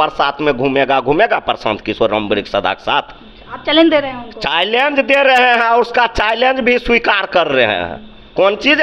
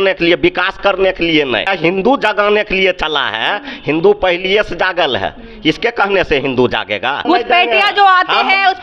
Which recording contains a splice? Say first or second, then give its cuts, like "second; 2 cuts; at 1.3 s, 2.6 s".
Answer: second; 2 cuts; at 1.7 s, 7.2 s